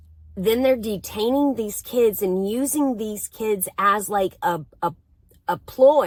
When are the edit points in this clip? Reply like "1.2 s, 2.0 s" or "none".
none